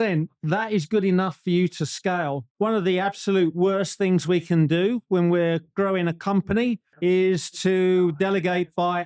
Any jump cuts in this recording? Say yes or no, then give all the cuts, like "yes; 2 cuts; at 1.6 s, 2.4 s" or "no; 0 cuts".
yes; 1 cut; at 2.5 s